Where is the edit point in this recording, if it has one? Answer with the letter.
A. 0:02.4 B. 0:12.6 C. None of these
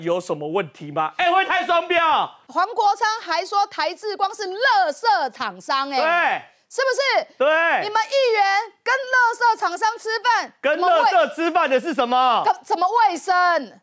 A